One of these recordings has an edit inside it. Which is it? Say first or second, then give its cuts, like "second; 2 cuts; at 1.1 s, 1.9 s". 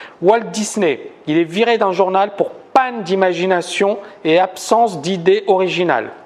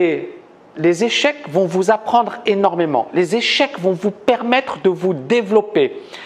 first; 1 cut; at 1.9 s